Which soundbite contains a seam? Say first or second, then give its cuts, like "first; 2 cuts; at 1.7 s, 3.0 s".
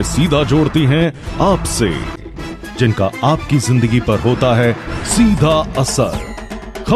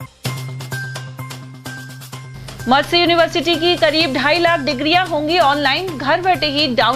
second; 1 cut; at 1.3 s